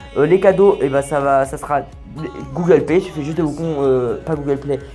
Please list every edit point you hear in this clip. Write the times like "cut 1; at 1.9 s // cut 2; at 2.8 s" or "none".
cut 1; at 2.9 s